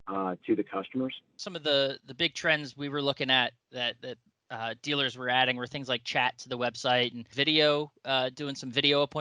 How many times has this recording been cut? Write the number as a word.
two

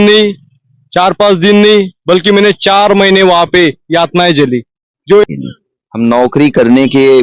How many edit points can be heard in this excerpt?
one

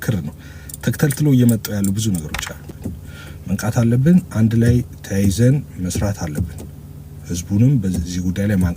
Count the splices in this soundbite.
one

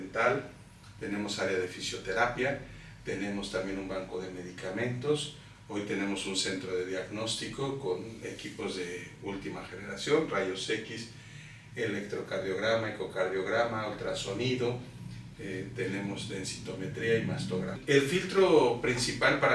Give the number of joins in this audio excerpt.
one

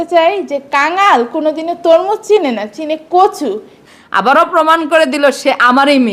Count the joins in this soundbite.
one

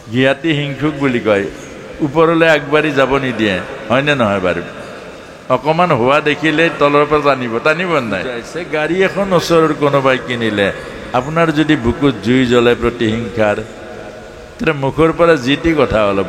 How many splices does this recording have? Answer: one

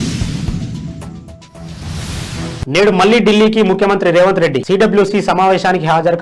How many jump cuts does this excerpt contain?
one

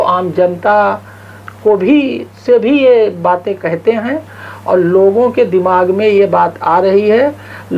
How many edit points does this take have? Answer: zero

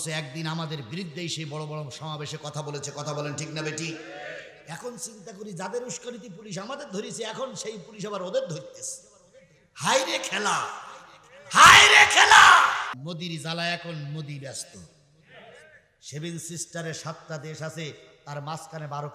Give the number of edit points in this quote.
one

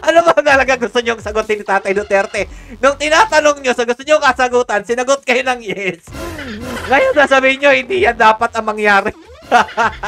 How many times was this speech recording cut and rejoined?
zero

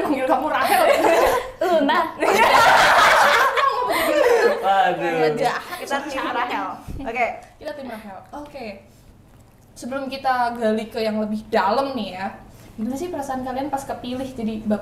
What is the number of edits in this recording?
zero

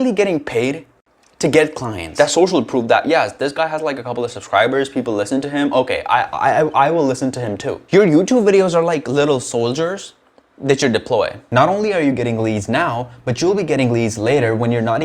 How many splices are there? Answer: three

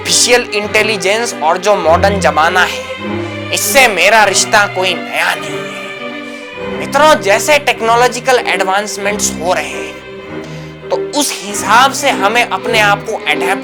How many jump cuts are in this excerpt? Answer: zero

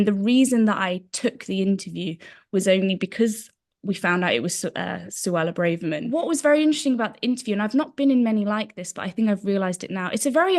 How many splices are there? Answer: one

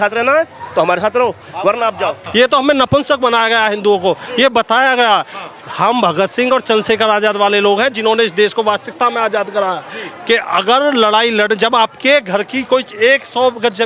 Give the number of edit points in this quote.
one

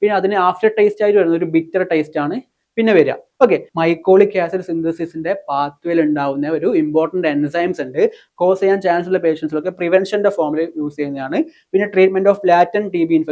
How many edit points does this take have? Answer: two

